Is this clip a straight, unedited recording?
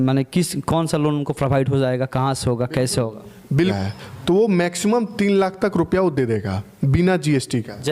no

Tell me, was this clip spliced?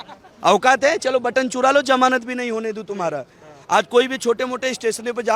no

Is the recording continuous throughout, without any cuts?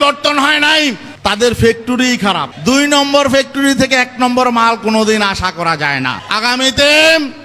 no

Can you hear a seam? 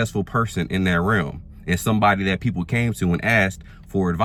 no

